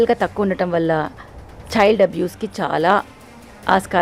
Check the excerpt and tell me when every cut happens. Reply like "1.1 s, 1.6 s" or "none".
none

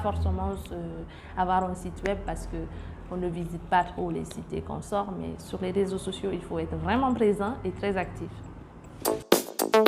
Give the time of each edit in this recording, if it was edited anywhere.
9.0 s

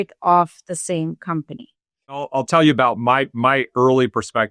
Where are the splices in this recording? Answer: 2.3 s

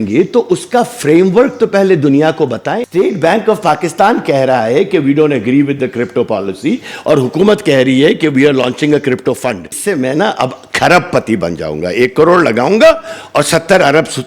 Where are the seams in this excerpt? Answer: 2.8 s, 9.7 s

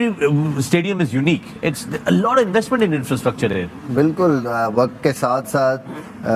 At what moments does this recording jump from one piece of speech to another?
none

